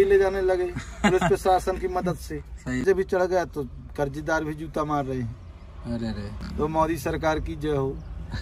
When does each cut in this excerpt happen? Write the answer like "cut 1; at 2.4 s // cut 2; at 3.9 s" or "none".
cut 1; at 2.8 s // cut 2; at 6.4 s